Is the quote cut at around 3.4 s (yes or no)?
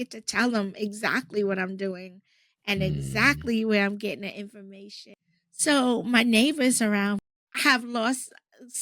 no